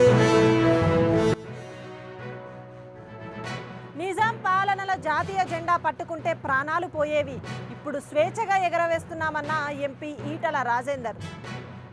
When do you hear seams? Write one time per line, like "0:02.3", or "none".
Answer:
0:01.0